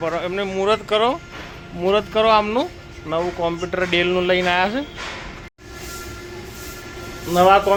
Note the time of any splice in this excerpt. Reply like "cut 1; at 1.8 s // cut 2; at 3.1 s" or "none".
none